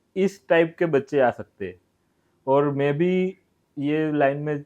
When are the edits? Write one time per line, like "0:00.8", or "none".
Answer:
none